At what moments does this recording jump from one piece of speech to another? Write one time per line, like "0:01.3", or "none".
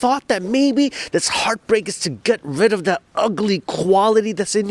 none